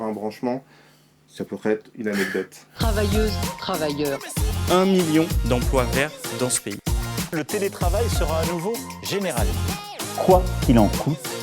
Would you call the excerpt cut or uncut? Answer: cut